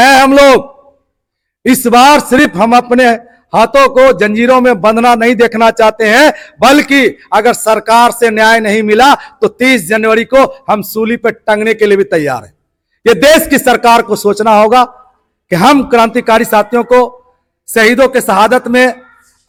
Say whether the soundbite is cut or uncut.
uncut